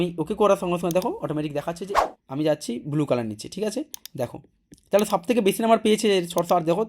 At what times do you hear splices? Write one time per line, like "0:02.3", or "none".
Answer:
0:01.9